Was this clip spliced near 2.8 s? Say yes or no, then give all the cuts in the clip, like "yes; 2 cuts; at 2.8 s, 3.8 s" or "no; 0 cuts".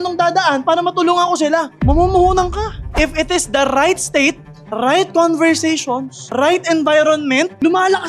yes; 1 cut; at 2.8 s